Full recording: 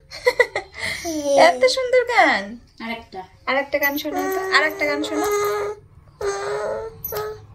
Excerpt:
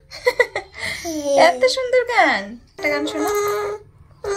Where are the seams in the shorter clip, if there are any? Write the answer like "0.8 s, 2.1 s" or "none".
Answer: 2.8 s